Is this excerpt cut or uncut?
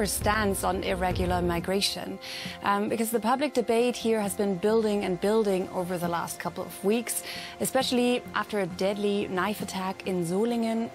uncut